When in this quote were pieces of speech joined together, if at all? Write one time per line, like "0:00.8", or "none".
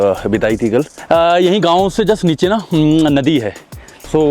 0:01.0